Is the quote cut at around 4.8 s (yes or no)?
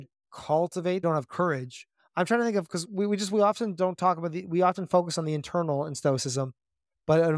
no